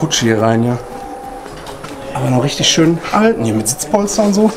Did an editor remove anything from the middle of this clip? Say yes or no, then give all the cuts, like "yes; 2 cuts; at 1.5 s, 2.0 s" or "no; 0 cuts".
yes; 1 cut; at 1.4 s